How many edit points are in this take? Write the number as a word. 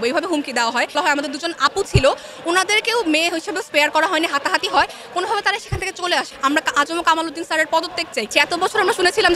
three